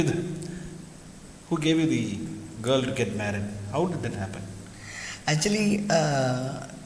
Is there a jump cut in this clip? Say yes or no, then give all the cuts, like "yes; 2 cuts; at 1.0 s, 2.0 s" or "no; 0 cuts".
no; 0 cuts